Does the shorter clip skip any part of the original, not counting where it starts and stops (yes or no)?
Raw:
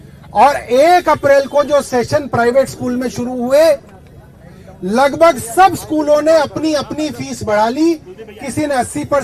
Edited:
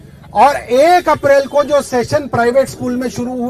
no